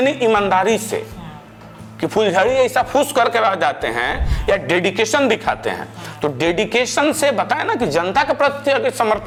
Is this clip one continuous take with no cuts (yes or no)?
yes